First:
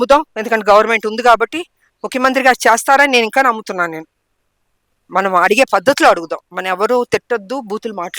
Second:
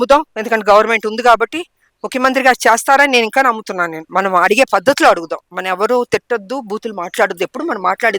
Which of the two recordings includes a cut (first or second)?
second